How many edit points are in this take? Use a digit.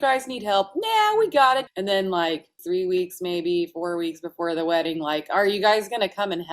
2